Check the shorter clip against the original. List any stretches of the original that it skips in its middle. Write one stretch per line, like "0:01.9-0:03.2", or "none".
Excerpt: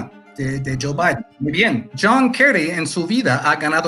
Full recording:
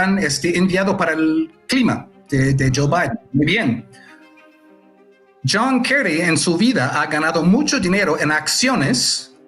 0:03.8-0:05.4